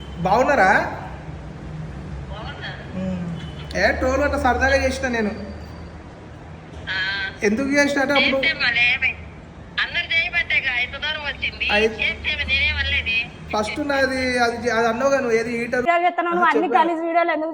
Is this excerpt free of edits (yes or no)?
no